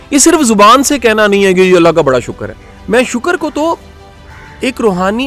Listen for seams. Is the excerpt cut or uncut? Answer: cut